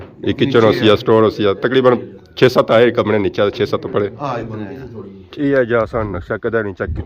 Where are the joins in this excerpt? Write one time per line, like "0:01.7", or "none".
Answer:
0:05.2

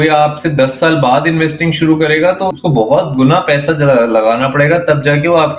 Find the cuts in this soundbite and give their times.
0:02.6

